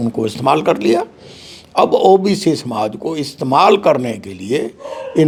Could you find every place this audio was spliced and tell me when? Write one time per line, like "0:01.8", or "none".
none

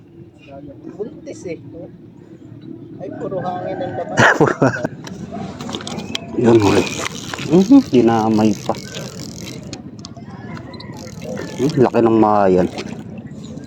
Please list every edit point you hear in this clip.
0:05.0

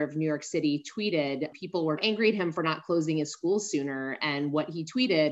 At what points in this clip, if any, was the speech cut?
0:02.0

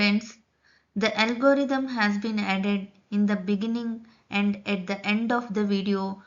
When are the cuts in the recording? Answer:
0:03.6

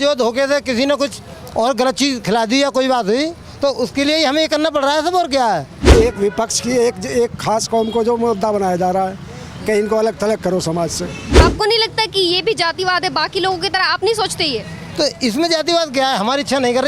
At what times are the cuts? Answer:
0:05.8
0:11.4

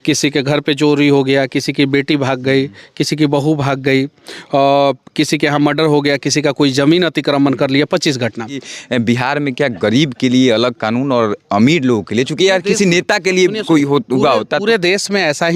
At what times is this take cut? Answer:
0:08.7

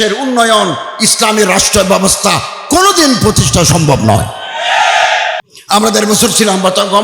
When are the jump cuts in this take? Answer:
0:05.4

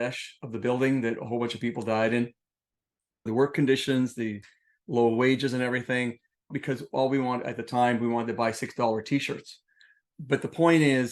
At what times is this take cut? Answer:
0:03.3

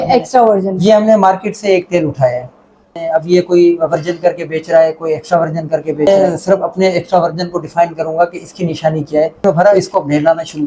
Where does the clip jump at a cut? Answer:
0:02.9
0:06.1
0:09.4

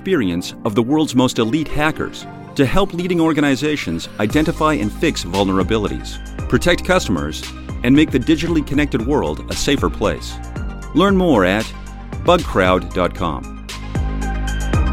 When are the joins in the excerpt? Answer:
0:13.7

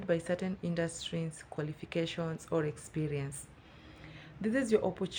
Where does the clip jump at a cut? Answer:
none

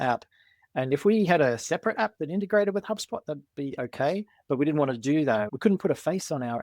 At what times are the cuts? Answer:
0:05.5

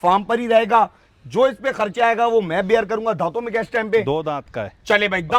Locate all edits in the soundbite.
none

